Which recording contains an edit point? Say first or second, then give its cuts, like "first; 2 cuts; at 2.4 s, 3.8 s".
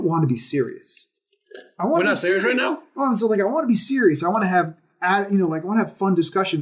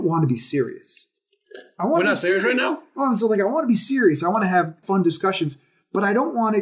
second; 1 cut; at 4.8 s